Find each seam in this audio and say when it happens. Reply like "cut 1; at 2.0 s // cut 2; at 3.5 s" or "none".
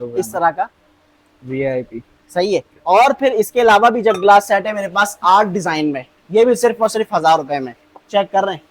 none